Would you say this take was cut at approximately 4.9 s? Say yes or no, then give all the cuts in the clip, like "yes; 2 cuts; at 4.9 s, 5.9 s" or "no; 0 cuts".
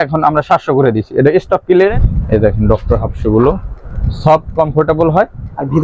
no; 1 cut; at 1.9 s